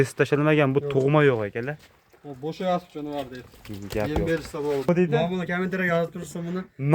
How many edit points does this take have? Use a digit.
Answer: 1